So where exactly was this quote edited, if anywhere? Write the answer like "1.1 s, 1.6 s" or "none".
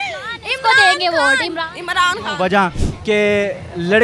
2.9 s